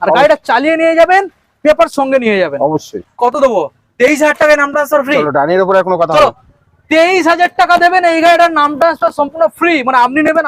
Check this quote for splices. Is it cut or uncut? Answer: cut